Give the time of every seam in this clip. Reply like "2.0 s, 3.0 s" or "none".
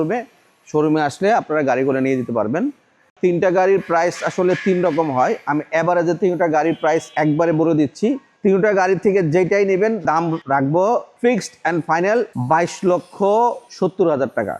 3.0 s, 7.1 s, 8.3 s, 10.1 s, 11.1 s, 12.4 s, 13.7 s